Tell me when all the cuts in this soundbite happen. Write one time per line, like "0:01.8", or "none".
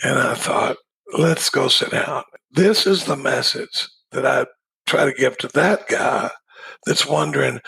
0:00.9
0:02.3